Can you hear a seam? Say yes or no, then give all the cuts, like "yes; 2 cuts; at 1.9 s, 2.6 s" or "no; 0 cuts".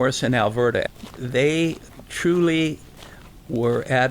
yes; 2 cuts; at 0.9 s, 1.9 s